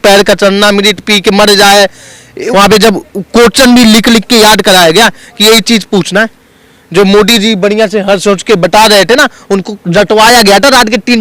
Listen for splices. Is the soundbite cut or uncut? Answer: cut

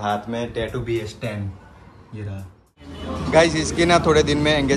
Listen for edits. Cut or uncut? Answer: cut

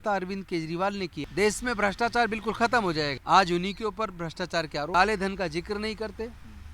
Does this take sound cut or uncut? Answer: cut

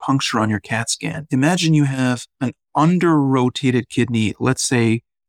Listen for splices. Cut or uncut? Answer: cut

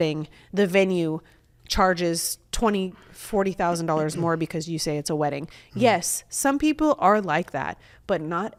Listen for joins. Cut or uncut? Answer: uncut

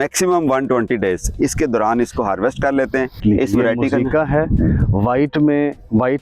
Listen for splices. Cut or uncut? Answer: cut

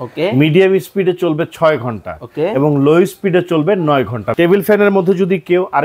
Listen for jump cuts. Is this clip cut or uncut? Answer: cut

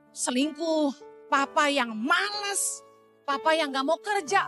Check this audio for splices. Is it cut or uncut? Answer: uncut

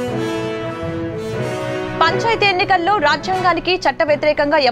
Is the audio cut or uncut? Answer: cut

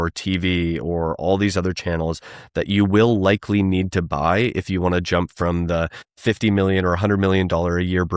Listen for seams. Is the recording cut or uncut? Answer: cut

